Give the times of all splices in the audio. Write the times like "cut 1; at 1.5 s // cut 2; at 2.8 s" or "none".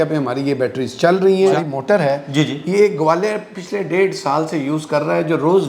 cut 1; at 1.5 s